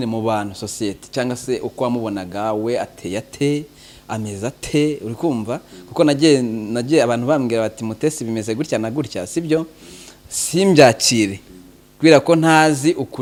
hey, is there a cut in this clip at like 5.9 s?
no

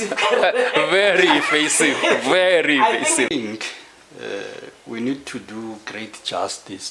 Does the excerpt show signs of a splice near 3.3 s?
yes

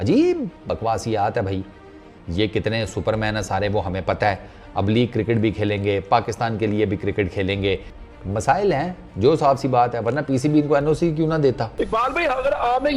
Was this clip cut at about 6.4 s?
no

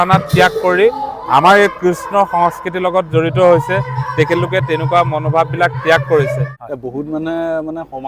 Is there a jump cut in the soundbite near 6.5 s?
yes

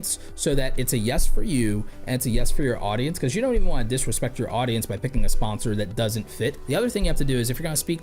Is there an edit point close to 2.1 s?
no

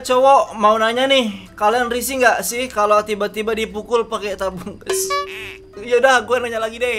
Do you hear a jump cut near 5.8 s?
yes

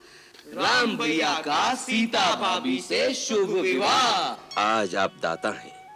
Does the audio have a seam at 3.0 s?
no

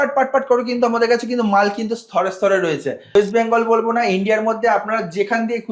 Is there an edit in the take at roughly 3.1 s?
yes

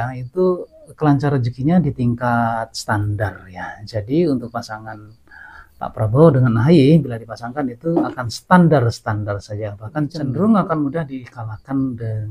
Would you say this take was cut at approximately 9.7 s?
no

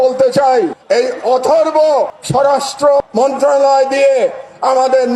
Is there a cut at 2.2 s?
yes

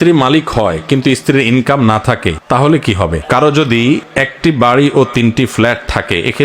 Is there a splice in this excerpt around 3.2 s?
yes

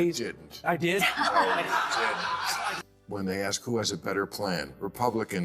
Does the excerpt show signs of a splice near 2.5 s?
yes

